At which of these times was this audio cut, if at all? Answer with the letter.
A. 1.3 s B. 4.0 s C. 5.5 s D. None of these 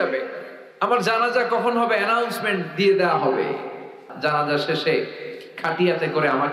B